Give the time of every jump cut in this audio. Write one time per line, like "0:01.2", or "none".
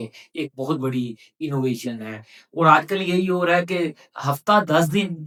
none